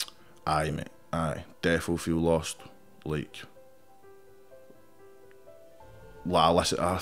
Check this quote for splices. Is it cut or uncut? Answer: uncut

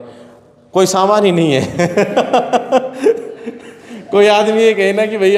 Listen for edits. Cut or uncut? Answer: uncut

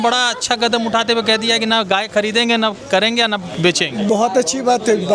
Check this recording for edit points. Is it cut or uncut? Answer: uncut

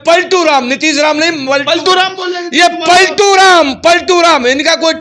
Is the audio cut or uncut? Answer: uncut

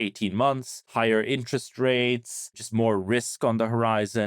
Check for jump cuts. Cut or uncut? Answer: cut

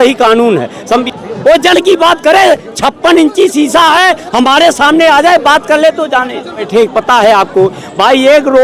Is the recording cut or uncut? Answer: cut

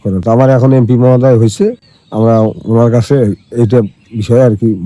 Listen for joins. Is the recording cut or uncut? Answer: uncut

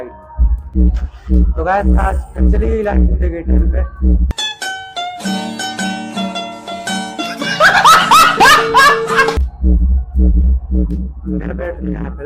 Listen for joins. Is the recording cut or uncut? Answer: uncut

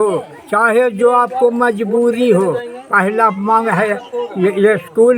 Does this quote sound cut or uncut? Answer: uncut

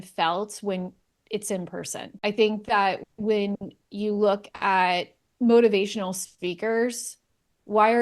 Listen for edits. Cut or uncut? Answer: cut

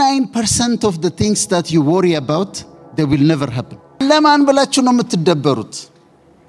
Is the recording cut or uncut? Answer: cut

